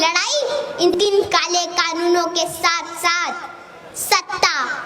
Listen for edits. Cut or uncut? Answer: cut